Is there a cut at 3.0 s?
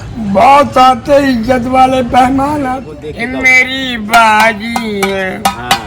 yes; 1 cut; at 3.0 s

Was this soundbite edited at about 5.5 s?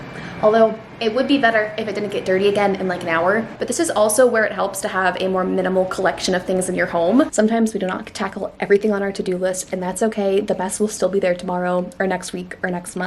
no; 2 cuts; at 3.5 s, 7.3 s

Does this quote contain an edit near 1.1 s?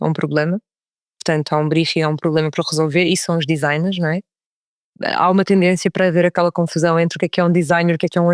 no; 1 cut; at 4.8 s

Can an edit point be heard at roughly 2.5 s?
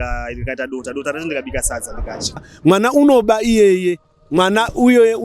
yes; 1 cut; at 2.5 s

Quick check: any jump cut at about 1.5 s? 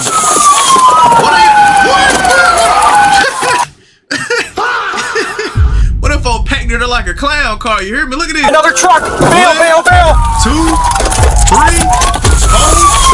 no; 1 cut; at 8.5 s

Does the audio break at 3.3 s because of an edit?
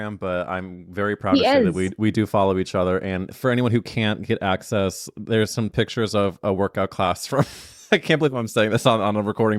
yes; 1 cut; at 3.3 s

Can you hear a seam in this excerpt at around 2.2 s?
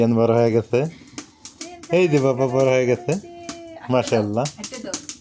no; 0 cuts

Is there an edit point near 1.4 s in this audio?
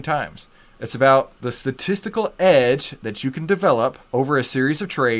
yes; 2 cuts; at 1.4 s, 4.0 s

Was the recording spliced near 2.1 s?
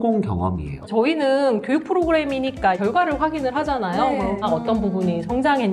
no; 2 cuts; at 0.8 s, 4.4 s

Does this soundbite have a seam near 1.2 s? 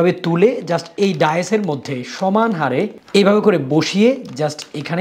no; 1 cut; at 3.0 s

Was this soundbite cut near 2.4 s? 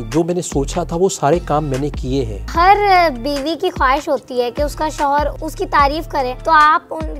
yes; 3 cuts; at 2.4 s, 5.4 s, 6.4 s

